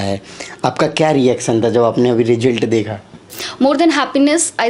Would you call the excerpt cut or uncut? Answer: cut